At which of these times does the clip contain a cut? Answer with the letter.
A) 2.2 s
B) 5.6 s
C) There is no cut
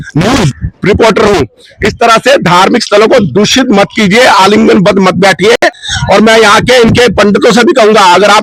C